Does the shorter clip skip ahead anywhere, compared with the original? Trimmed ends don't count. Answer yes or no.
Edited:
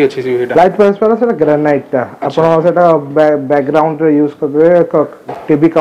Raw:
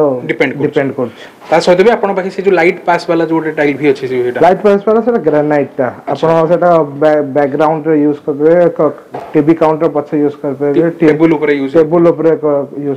no